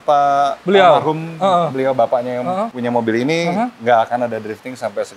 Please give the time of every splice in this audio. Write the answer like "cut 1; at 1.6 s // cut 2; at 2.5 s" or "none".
cut 1; at 2.7 s